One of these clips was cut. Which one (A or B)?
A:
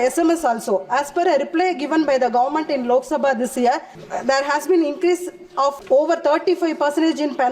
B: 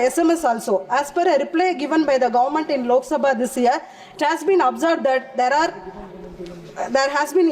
A